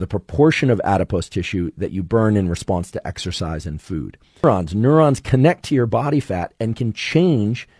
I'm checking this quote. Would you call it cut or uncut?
cut